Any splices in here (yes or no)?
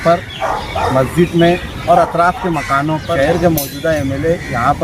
yes